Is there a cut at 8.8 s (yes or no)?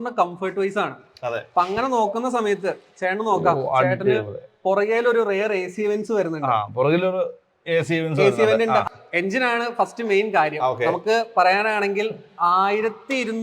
yes